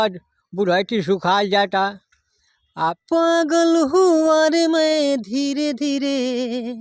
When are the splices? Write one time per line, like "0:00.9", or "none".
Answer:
0:03.0